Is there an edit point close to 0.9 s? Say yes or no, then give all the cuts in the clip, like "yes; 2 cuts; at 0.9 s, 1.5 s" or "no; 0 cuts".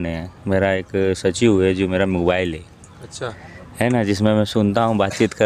no; 0 cuts